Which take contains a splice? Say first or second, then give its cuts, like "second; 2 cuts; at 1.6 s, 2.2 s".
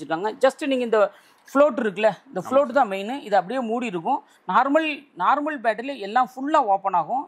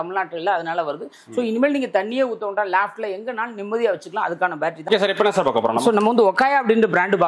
second; 1 cut; at 4.8 s